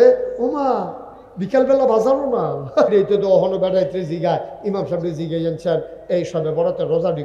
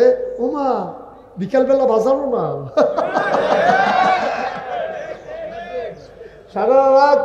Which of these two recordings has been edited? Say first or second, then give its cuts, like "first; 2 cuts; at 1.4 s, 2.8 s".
first; 1 cut; at 2.9 s